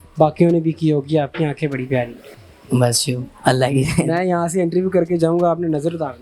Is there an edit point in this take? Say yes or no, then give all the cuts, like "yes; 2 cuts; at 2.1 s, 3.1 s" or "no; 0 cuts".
no; 0 cuts